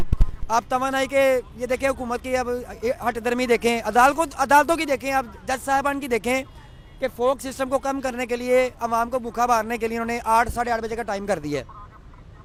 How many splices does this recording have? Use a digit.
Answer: 0